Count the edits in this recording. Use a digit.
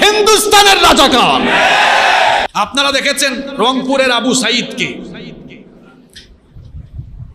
1